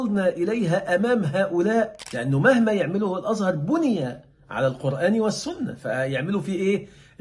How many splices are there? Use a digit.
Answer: 1